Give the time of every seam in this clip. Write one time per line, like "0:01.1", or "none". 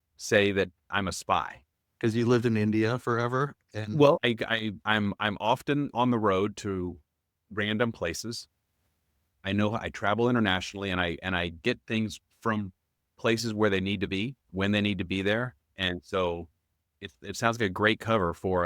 0:04.2
0:12.3
0:14.4